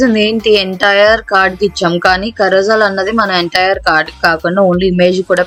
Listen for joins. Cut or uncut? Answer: uncut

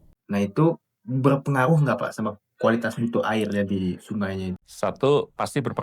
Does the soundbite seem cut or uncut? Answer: cut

